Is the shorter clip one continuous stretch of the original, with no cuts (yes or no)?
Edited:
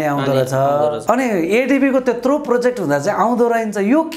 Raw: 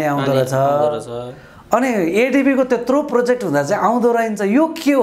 no